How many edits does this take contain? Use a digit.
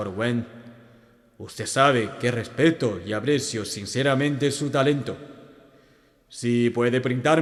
0